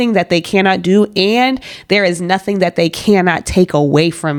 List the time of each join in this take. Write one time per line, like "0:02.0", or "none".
none